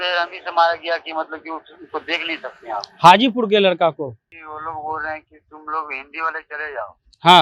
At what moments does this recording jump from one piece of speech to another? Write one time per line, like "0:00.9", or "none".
0:04.3